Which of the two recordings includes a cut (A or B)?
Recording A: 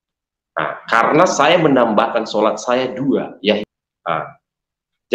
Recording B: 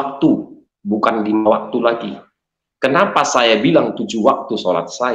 A